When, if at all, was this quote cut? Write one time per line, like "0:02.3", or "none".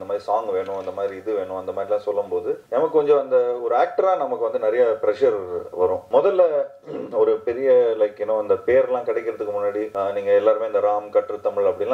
0:02.6
0:06.0
0:09.9